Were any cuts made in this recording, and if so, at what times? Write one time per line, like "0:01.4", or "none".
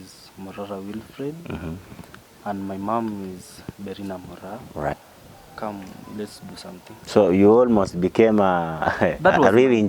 0:04.9

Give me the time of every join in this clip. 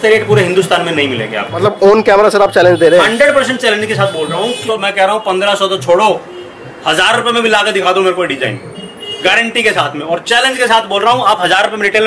0:01.6
0:04.6

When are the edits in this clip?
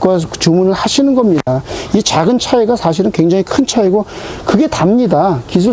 none

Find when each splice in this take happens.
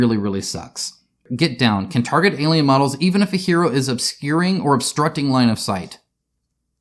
0:01.3

